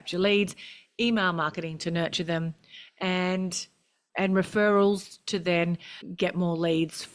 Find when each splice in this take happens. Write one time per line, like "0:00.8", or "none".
0:04.1

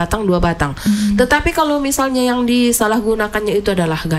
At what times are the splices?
none

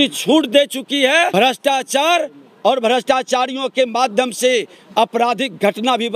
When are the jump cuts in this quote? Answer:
none

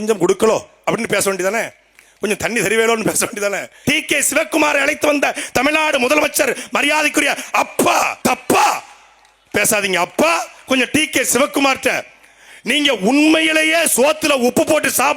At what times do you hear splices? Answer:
0:03.8
0:08.1

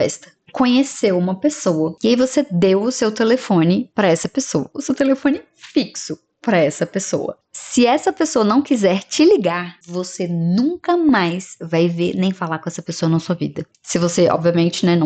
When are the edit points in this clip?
none

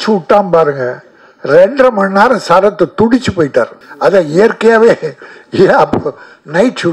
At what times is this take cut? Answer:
0:03.8

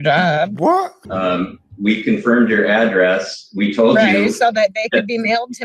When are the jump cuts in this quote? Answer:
0:01.0

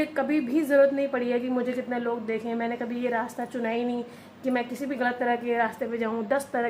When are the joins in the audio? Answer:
none

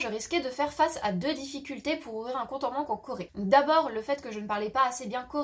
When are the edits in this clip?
0:03.3

